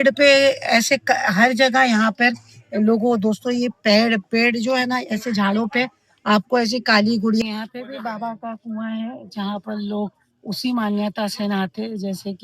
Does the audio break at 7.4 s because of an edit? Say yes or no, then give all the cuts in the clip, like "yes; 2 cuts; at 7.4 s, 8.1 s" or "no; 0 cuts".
yes; 1 cut; at 7.4 s